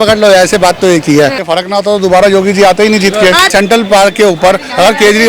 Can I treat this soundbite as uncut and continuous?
no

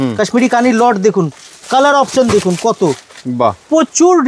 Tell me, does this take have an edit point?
no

